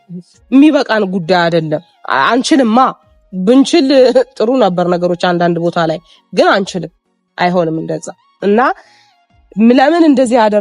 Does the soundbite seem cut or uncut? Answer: uncut